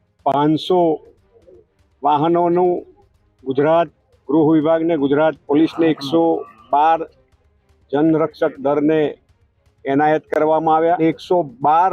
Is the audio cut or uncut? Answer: cut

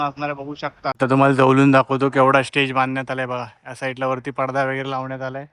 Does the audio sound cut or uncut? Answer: cut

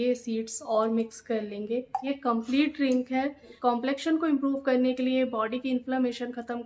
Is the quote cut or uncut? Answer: cut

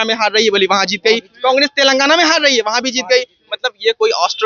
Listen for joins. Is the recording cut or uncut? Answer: uncut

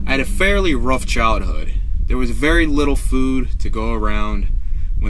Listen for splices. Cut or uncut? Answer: uncut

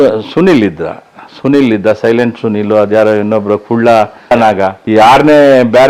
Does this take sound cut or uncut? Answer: uncut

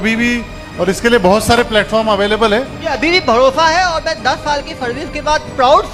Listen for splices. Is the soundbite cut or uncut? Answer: cut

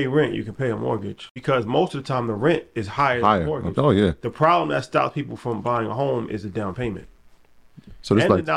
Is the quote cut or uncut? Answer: cut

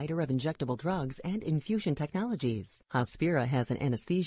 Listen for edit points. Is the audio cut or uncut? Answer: cut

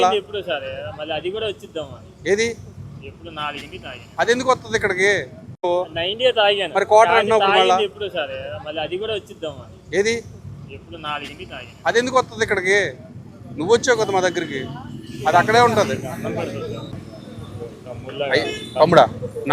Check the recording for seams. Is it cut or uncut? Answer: uncut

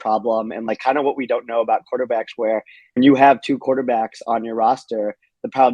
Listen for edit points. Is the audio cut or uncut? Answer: cut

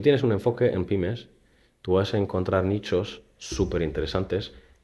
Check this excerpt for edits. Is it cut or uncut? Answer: uncut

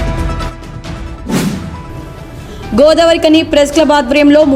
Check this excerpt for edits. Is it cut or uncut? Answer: cut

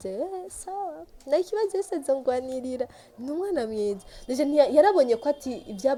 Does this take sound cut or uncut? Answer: uncut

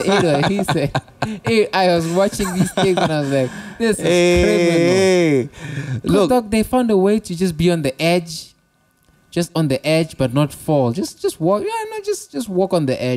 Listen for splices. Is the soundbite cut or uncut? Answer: uncut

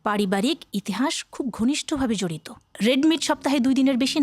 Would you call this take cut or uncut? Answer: cut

